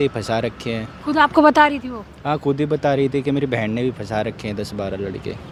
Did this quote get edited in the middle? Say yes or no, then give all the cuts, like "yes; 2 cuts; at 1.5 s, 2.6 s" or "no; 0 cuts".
no; 0 cuts